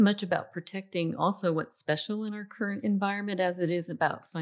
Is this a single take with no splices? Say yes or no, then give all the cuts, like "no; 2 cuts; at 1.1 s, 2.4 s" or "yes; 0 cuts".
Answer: yes; 0 cuts